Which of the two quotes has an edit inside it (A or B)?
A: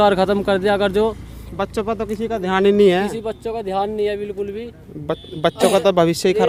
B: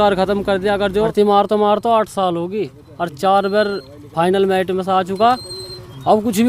B